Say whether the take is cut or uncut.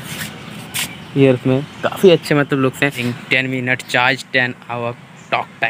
cut